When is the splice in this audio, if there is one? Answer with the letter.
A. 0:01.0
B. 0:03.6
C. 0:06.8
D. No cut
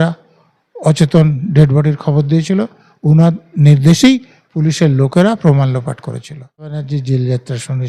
C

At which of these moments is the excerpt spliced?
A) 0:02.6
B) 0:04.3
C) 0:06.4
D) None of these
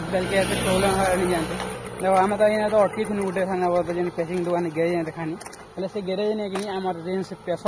D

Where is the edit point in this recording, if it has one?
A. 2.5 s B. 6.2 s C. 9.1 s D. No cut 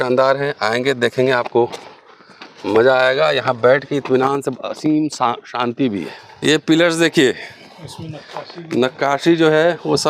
B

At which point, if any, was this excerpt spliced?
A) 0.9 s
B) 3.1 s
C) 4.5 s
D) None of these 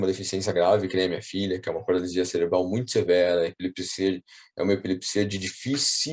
D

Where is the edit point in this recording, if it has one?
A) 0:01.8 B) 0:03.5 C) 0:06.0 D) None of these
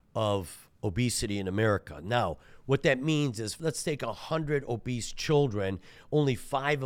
B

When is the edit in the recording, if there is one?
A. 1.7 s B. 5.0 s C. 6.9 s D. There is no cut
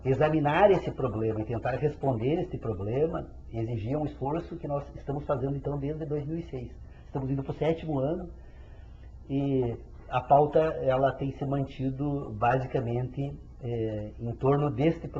D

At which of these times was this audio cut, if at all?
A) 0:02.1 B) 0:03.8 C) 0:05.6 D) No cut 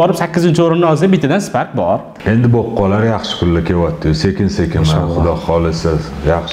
A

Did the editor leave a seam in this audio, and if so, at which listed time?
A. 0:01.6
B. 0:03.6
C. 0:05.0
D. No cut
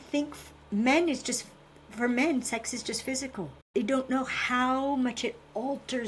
B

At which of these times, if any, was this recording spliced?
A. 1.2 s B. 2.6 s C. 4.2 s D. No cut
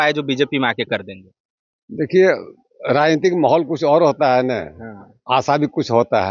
D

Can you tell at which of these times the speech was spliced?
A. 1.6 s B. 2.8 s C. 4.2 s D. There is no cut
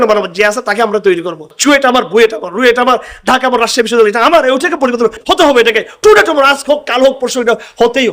A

